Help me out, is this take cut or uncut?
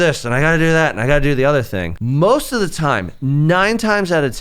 cut